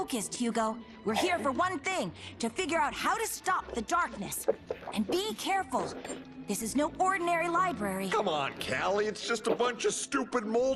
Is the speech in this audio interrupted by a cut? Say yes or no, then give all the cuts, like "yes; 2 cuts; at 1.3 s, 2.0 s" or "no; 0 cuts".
yes; 1 cut; at 1.3 s